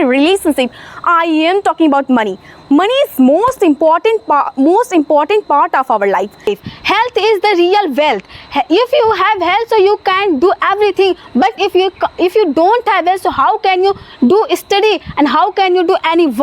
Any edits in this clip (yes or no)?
yes